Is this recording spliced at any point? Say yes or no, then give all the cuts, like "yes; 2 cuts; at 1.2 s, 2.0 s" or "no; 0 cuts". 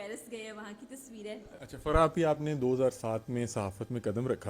yes; 1 cut; at 1.5 s